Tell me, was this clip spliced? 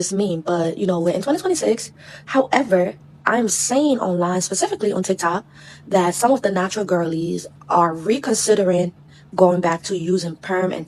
no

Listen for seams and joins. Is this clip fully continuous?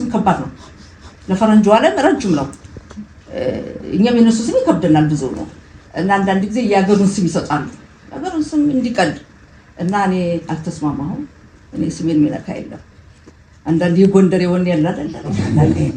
yes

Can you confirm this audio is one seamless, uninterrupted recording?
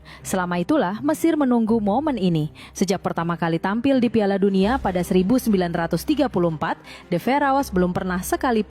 yes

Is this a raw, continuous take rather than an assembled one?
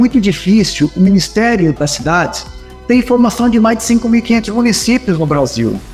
yes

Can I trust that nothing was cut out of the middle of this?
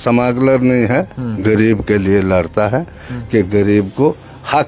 yes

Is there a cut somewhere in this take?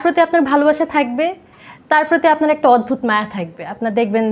no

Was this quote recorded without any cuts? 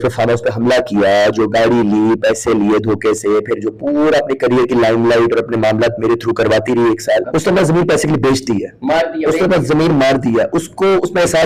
no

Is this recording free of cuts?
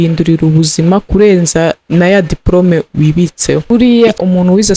no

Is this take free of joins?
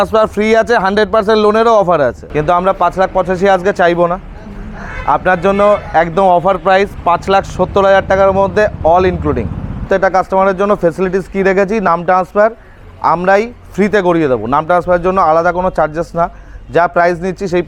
no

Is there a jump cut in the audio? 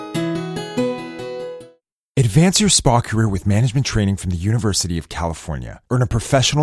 yes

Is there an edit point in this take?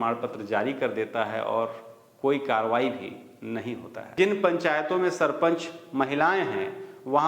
yes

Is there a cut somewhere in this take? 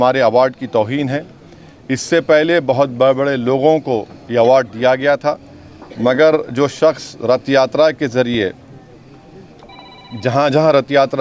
no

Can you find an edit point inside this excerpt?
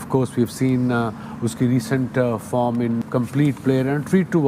yes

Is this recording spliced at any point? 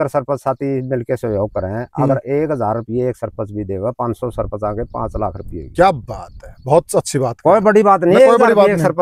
no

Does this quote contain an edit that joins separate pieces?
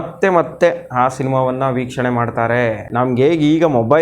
yes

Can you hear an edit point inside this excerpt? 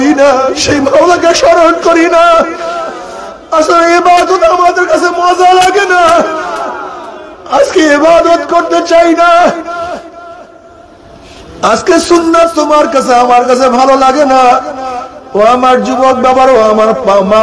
no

